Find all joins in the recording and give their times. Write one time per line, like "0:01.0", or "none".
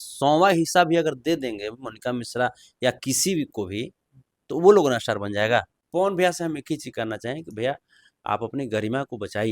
0:05.8